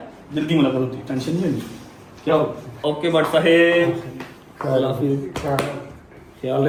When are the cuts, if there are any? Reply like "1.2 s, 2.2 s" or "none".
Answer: none